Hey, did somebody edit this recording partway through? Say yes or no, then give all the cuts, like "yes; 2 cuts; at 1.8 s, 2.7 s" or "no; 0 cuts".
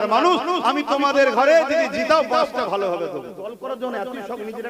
yes; 1 cut; at 3.3 s